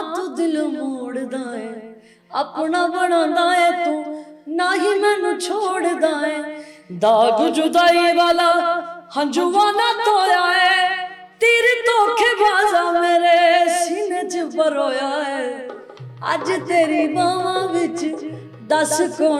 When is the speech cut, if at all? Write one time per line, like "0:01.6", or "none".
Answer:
none